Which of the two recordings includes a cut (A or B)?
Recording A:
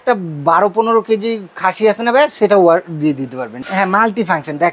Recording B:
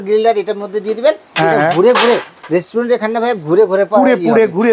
A